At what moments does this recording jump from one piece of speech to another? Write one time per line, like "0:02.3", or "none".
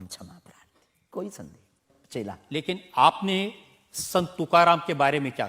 0:01.9